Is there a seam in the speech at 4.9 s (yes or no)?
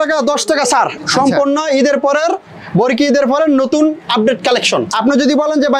yes